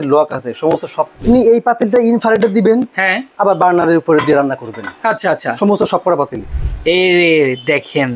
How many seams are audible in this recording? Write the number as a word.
two